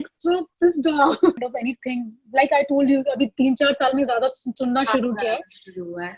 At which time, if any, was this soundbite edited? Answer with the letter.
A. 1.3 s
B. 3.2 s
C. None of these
A